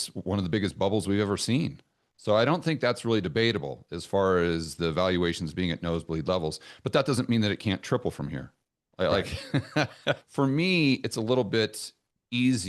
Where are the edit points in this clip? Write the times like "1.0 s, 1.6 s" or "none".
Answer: 10.2 s

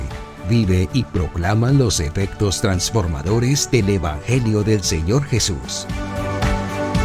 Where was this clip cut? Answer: 5.7 s

